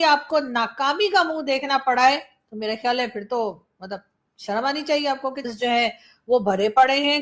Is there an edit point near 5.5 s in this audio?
yes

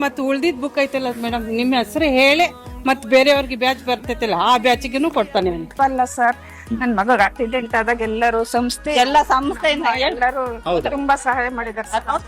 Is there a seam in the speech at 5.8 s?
yes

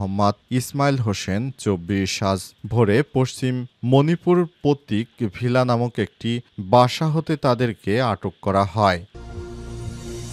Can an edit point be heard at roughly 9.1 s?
yes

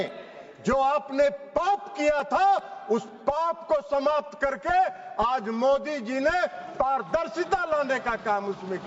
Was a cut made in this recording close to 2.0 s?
no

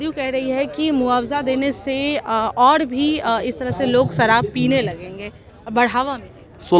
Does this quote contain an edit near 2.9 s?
no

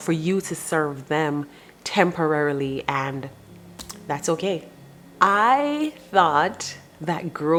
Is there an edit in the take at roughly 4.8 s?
no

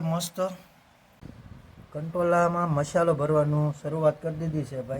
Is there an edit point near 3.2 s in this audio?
no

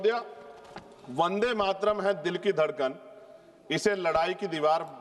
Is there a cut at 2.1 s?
no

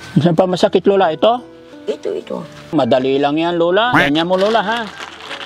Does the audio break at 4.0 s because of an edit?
yes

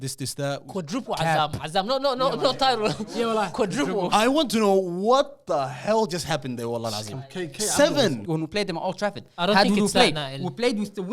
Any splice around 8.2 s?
yes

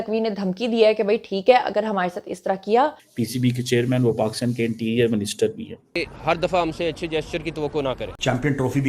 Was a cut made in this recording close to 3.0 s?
yes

